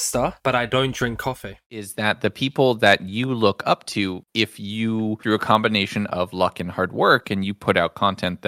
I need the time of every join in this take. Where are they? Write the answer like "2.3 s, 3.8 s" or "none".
1.9 s